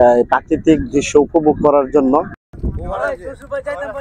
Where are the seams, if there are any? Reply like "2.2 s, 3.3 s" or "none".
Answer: 2.4 s